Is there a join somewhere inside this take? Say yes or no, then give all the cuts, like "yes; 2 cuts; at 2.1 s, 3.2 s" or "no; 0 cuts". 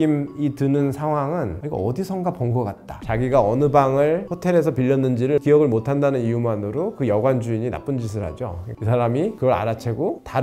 yes; 2 cuts; at 3.0 s, 8.8 s